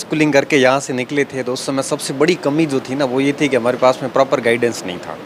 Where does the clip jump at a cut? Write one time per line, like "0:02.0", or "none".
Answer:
none